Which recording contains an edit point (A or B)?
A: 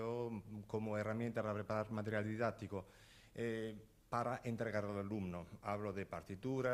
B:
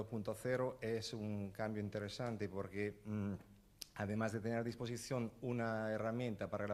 A